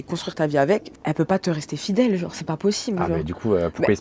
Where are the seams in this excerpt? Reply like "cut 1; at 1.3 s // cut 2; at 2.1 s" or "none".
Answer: cut 1; at 0.9 s